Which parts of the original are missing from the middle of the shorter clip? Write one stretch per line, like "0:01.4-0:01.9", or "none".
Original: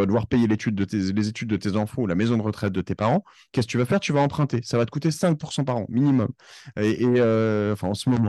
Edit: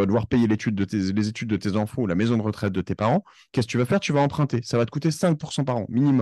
none